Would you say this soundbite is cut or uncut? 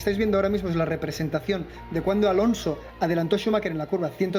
uncut